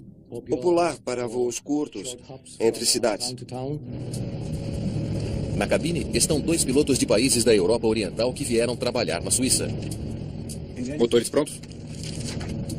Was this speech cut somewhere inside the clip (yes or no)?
no